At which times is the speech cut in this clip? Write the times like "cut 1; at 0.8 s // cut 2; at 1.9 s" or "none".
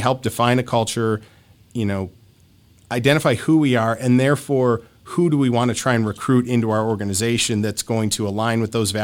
none